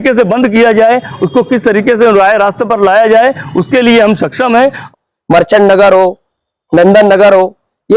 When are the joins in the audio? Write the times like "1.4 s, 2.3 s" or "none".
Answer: 4.9 s